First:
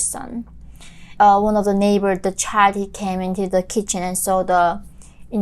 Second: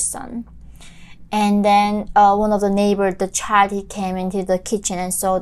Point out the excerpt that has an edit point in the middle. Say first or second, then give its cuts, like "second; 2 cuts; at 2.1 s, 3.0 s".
first; 1 cut; at 1.1 s